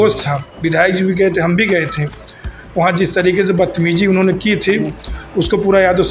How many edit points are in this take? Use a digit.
0